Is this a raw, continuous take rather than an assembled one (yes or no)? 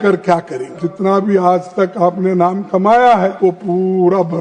no